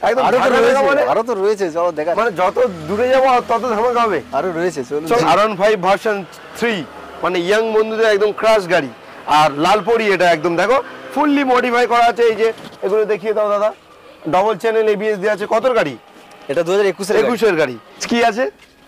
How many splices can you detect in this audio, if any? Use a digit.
2